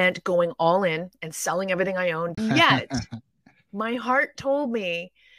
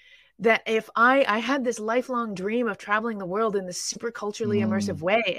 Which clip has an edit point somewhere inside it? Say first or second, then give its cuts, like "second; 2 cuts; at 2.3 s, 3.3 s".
first; 1 cut; at 2.4 s